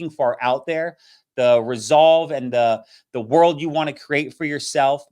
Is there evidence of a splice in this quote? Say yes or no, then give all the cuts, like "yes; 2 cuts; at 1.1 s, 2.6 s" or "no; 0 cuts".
no; 0 cuts